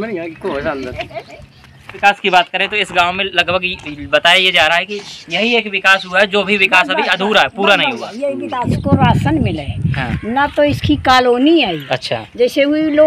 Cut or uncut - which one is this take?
cut